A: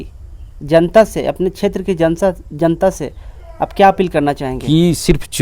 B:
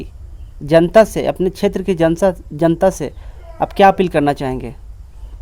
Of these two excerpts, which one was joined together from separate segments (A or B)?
A